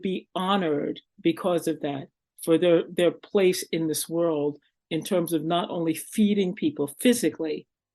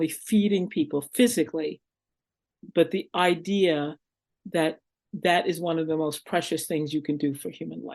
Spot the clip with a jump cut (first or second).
first